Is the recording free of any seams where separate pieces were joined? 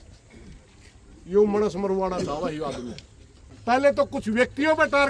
no; 1 cut; at 3.5 s

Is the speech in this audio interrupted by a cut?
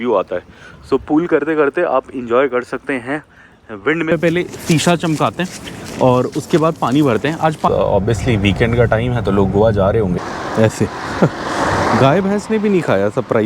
yes; 3 cuts; at 4.1 s, 7.7 s, 10.2 s

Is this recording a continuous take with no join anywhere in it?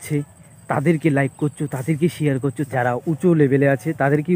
no; 1 cut; at 2.7 s

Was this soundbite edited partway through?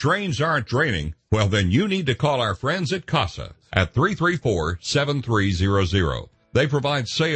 no; 0 cuts

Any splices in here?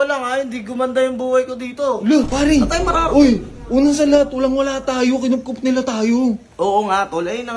yes; 1 cut; at 2.3 s

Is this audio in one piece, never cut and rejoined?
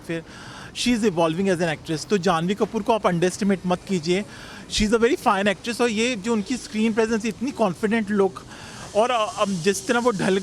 yes; 0 cuts

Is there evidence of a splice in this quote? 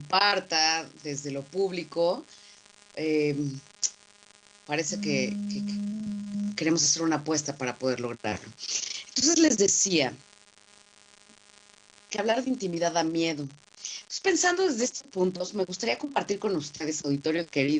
no; 0 cuts

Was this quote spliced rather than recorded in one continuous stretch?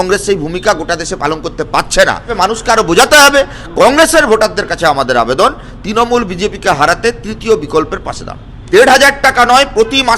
yes; 2 cuts; at 2.3 s, 8.7 s

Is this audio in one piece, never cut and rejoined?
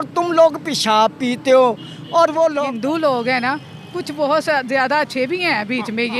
no; 1 cut; at 2.6 s

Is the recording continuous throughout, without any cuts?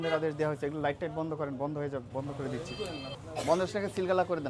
no; 1 cut; at 3.1 s

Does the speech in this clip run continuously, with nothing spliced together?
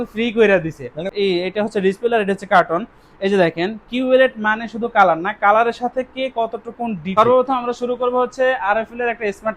no; 2 cuts; at 1.0 s, 7.1 s

